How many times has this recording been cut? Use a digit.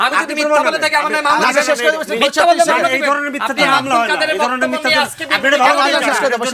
0